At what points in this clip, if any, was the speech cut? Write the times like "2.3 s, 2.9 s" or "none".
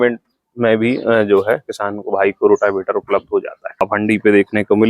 3.8 s